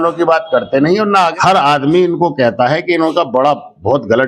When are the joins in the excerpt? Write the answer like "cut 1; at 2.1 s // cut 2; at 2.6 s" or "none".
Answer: cut 1; at 1.4 s